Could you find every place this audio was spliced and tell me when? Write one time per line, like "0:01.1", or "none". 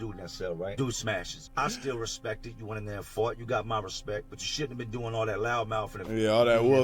0:00.8
0:01.4
0:04.4